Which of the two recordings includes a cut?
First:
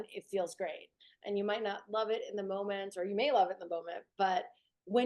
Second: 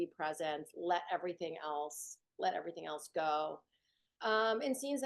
first; 1 cut; at 0.9 s

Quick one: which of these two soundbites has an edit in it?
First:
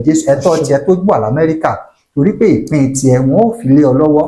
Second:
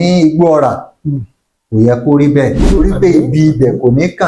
second; 1 cut; at 2.8 s

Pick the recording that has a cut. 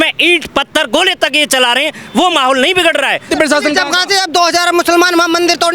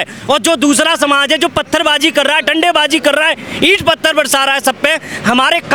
first; 1 cut; at 3.3 s

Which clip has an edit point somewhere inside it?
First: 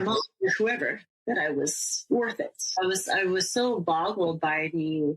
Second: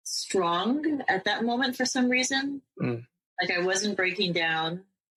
first; 1 cut; at 2.6 s

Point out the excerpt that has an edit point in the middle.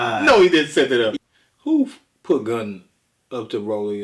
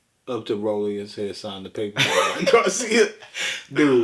first; 1 cut; at 1.1 s

